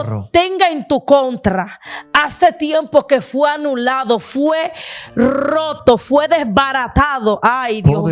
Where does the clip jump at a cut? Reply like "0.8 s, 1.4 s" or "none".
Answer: none

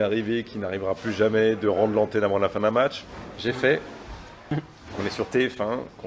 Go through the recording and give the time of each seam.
4.4 s

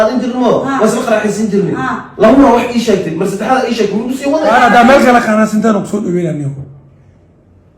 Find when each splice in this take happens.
4.5 s

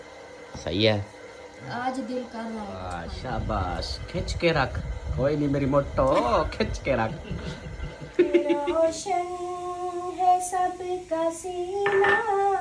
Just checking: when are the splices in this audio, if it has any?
3.0 s, 8.7 s

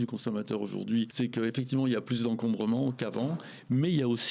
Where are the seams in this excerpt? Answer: 1.1 s

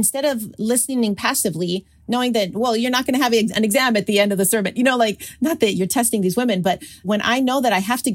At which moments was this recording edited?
7.0 s

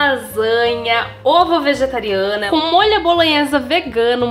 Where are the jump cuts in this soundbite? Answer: 2.4 s

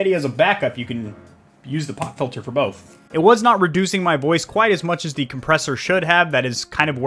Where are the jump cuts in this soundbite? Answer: 3.0 s

